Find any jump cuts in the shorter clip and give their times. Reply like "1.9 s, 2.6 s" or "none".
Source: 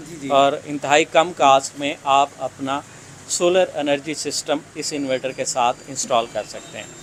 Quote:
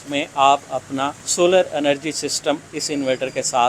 1.2 s